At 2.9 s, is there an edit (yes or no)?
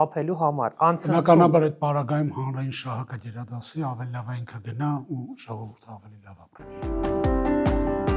no